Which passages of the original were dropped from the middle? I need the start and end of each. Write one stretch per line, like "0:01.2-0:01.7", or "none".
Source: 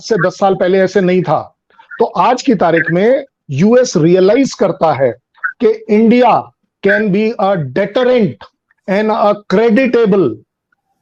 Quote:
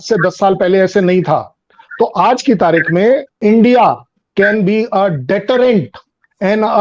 0:03.3-0:05.8